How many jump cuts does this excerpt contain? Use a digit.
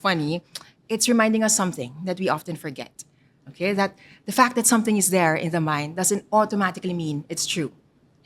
1